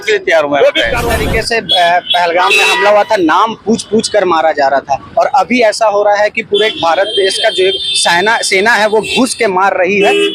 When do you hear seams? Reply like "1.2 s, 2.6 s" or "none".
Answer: 1.0 s